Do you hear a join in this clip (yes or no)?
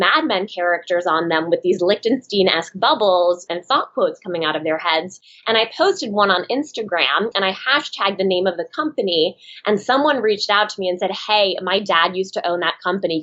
no